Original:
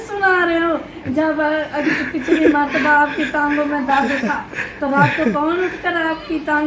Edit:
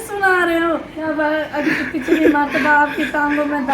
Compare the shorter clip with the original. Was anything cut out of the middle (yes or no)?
yes